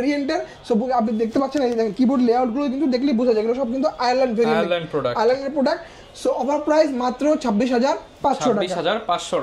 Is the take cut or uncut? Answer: uncut